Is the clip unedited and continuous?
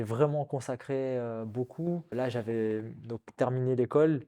no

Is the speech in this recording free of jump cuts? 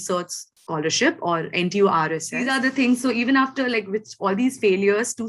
no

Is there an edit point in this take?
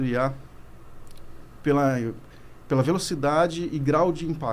no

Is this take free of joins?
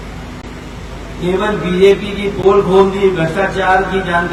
yes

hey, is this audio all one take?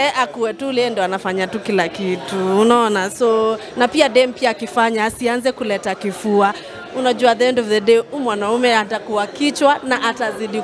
yes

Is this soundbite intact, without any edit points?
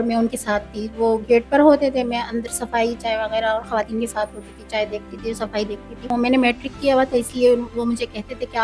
no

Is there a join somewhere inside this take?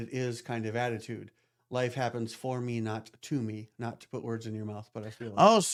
no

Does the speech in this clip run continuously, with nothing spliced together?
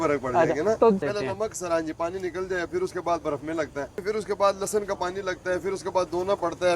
no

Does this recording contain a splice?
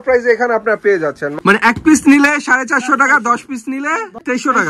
yes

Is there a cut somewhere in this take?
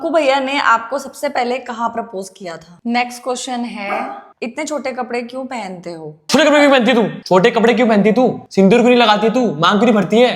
yes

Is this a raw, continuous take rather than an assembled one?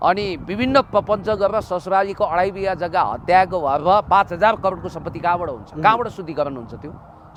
yes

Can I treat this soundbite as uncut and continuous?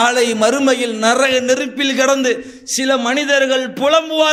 yes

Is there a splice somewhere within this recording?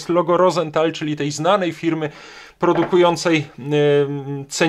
no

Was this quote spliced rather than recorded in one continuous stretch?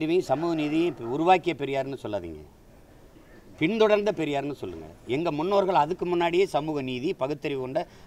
no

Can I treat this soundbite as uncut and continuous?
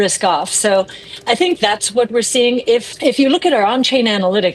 no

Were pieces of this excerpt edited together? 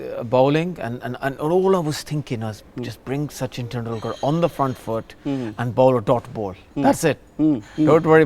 no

